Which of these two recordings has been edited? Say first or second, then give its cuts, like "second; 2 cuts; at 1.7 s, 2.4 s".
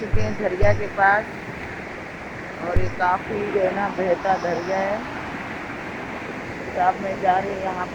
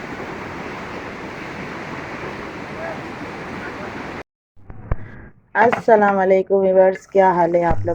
second; 1 cut; at 4.4 s